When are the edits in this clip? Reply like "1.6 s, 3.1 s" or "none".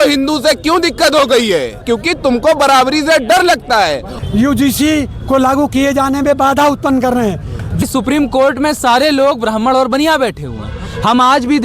1.8 s, 4.1 s, 7.8 s

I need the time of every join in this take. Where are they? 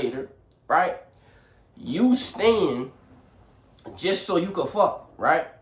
none

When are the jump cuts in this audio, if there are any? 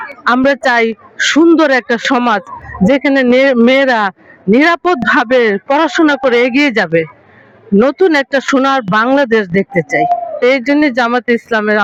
none

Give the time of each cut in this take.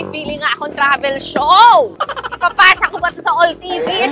none

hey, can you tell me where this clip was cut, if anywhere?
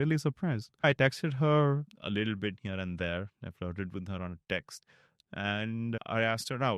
0.8 s, 1.9 s

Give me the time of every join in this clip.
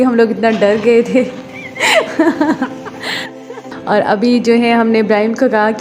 3.7 s

